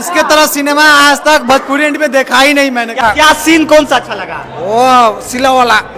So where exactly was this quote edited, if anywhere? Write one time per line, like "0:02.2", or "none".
0:03.0

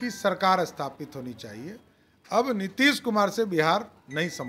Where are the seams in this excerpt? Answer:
none

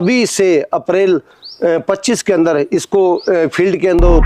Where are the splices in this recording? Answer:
none

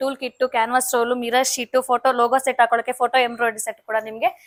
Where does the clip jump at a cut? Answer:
none

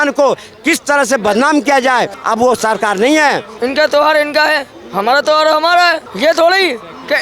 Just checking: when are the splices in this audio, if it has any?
0:03.5
0:06.1

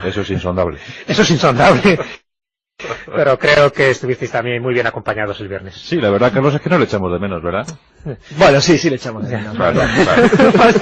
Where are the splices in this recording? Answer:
none

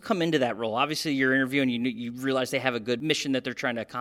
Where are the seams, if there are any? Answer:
0:03.0

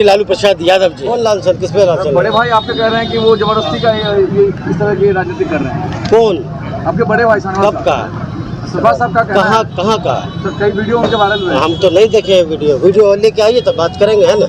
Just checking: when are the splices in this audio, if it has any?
0:01.2

